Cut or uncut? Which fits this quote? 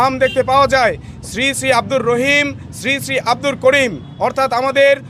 uncut